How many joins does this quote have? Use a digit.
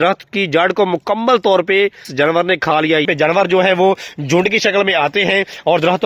2